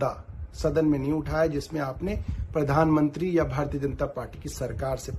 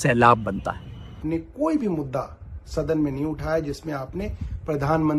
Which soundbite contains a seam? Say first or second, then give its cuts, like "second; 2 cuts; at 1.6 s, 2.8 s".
second; 1 cut; at 1.2 s